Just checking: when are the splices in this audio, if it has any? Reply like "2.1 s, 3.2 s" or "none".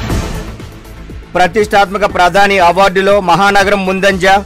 none